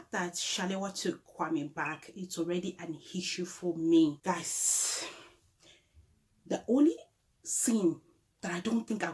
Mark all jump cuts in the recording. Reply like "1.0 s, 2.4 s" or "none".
4.2 s